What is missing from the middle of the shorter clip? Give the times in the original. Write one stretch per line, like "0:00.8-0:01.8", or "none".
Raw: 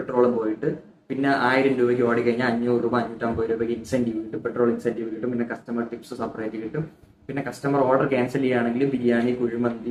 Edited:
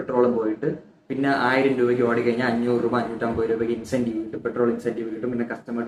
none